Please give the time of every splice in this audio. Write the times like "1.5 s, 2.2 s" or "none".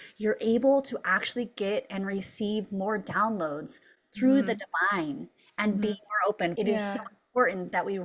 6.5 s